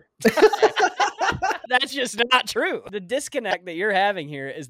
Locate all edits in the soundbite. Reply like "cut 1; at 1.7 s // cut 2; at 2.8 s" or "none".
cut 1; at 1.6 s // cut 2; at 2.9 s